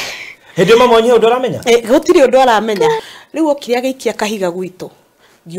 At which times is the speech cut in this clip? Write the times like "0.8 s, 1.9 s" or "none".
3.0 s

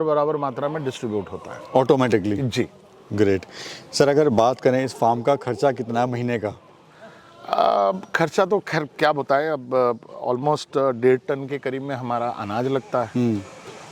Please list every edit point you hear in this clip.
none

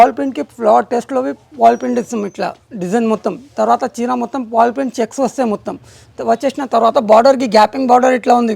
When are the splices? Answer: none

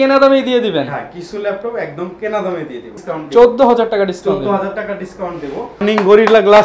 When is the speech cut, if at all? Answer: 2.9 s, 5.8 s

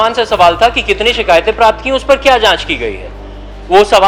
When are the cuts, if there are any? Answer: none

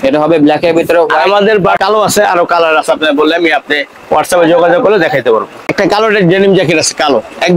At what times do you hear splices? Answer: 1.8 s, 5.6 s

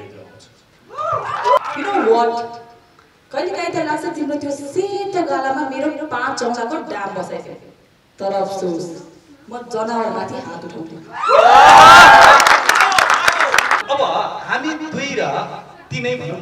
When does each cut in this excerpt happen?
1.6 s, 13.8 s

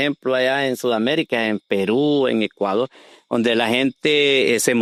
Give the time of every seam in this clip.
none

